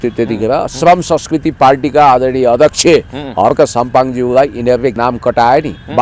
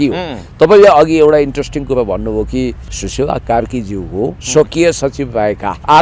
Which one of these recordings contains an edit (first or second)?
first